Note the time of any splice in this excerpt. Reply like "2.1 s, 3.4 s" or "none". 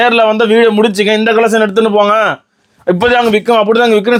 none